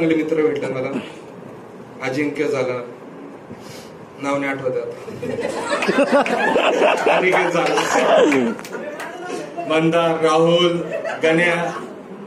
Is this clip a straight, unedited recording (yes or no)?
yes